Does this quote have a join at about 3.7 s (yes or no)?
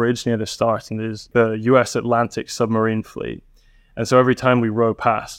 no